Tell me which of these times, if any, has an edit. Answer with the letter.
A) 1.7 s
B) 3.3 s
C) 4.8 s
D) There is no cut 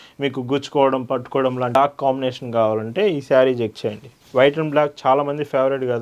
A